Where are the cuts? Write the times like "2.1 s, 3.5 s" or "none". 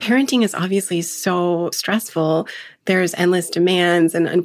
1.8 s